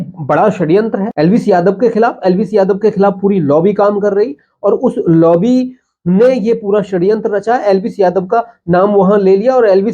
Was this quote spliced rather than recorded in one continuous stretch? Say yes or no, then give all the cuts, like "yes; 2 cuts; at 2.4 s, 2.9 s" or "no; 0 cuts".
yes; 1 cut; at 1.1 s